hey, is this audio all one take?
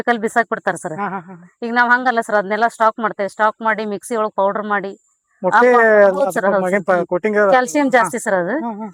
yes; 0 cuts

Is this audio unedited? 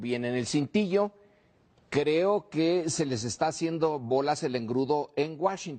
yes; 0 cuts

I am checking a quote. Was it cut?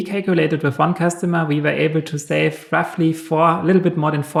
no; 0 cuts

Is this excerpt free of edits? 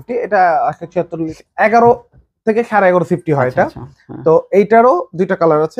no; 1 cut; at 1.2 s

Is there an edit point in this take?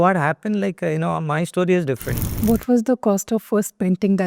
yes; 1 cut; at 2.2 s

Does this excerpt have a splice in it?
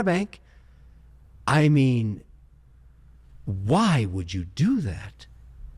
no; 0 cuts

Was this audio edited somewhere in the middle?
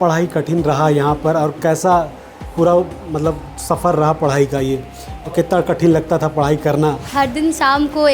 yes; 1 cut; at 7.1 s

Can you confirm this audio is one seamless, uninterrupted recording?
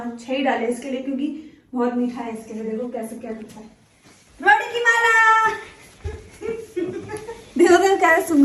yes; 0 cuts

